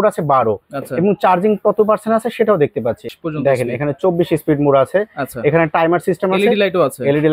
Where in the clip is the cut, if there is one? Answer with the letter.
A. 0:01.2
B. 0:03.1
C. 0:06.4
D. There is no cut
B